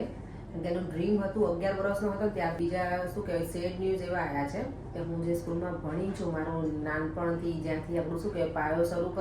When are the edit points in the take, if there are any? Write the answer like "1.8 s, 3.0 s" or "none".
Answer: 2.6 s